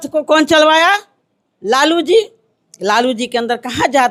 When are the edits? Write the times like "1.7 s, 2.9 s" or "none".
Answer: none